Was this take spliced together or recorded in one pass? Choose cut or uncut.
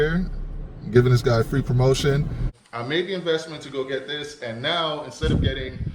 cut